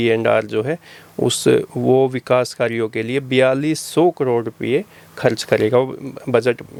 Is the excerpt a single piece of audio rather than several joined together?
yes; 0 cuts

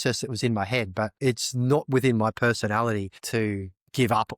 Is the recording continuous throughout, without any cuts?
no; 2 cuts; at 1.1 s, 3.2 s

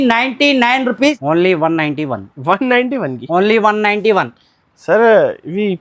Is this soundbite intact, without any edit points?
no; 1 cut; at 1.2 s

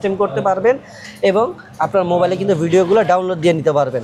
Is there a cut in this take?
no; 0 cuts

